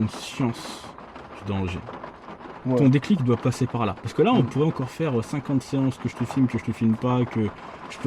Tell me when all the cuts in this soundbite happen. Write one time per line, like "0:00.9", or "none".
none